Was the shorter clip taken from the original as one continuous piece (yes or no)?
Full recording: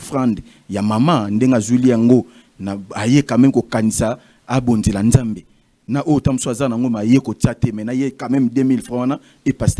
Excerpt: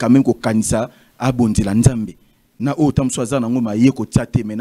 yes